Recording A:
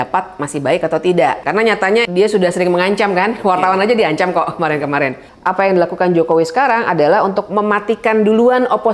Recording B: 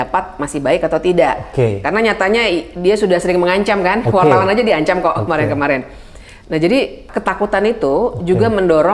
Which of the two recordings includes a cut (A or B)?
A